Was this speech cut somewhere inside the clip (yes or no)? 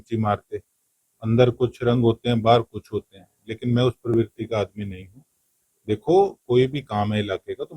no